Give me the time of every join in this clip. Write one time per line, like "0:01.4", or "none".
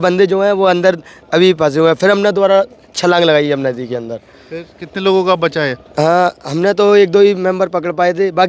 none